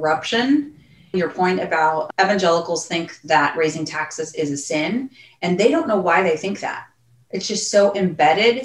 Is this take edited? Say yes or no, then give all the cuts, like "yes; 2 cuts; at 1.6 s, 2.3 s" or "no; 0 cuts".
yes; 2 cuts; at 1.1 s, 2.1 s